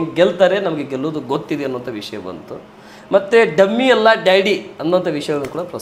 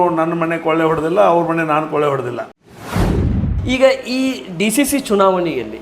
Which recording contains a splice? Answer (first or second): second